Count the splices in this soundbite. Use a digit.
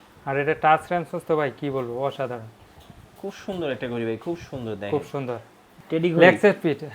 1